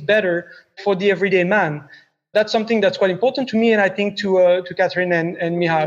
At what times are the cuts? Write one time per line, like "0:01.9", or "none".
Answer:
0:00.8
0:02.3
0:03.4
0:04.7